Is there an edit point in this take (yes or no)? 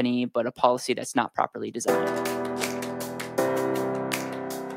yes